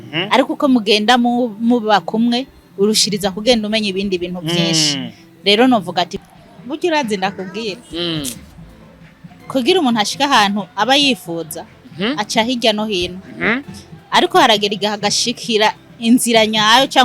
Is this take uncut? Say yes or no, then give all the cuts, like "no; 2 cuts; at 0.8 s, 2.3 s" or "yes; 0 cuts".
no; 1 cut; at 6.2 s